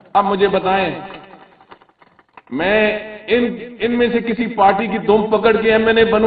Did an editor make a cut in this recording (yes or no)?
no